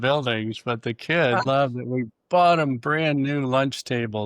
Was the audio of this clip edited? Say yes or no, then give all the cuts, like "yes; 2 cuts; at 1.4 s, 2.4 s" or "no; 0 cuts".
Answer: yes; 1 cut; at 1.4 s